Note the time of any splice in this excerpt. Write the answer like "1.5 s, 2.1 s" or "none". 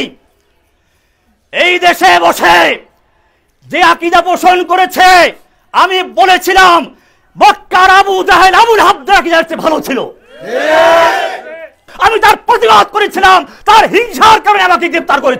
11.9 s